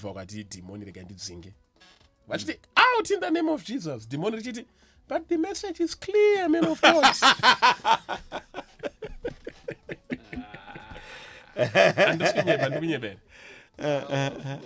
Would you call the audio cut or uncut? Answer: uncut